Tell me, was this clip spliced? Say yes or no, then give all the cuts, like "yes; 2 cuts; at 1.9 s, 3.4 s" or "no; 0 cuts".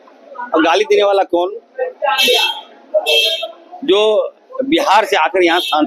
no; 0 cuts